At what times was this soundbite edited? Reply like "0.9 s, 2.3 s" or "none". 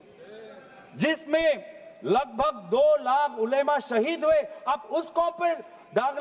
none